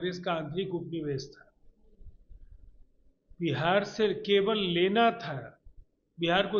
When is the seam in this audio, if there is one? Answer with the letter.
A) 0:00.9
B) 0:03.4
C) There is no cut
C